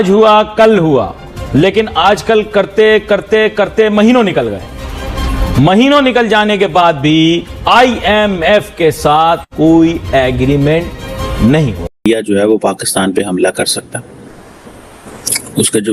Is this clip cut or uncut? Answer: uncut